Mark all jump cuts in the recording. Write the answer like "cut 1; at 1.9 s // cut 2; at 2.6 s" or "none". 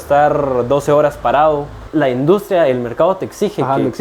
cut 1; at 1.8 s